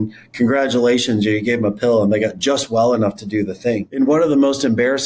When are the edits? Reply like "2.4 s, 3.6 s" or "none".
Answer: 3.9 s